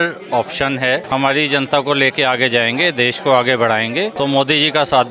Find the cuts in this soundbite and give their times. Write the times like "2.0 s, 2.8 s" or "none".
1.0 s, 4.1 s